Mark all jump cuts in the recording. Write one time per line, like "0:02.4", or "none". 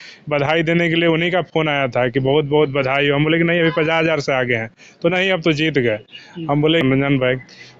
0:06.8